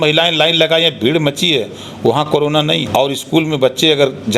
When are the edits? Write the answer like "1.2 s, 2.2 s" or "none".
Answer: 2.9 s